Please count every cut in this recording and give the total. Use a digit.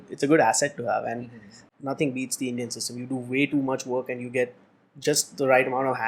1